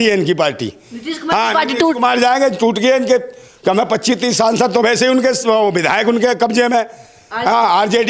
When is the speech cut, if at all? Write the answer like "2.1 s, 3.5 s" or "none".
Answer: none

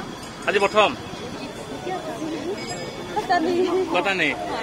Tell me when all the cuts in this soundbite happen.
1.3 s

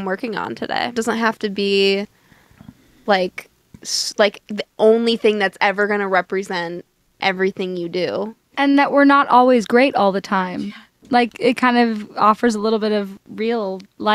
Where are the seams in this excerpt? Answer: 1.0 s, 8.4 s

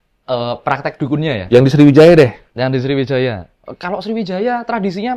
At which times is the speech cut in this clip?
none

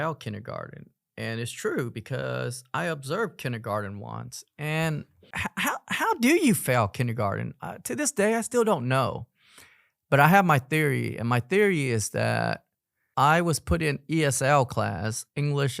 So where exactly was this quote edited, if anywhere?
5.3 s

